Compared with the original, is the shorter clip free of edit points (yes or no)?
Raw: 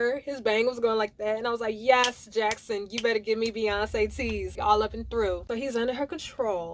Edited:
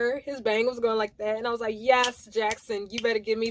yes